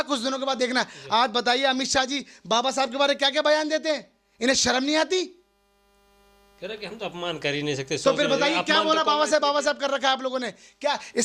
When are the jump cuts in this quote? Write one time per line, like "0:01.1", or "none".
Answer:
none